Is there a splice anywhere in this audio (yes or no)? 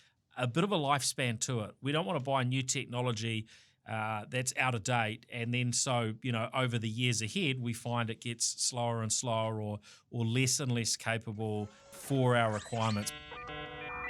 yes